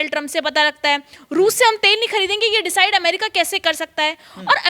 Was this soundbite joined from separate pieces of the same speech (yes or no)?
no